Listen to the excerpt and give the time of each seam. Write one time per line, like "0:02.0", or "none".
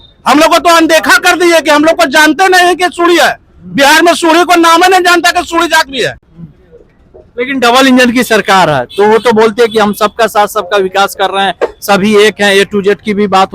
none